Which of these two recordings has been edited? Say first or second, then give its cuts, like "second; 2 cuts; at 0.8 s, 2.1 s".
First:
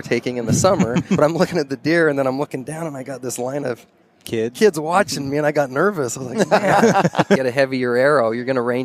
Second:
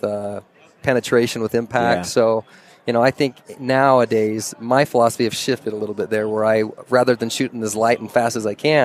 first; 2 cuts; at 1.2 s, 7.4 s